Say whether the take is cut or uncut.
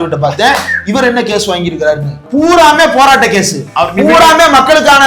cut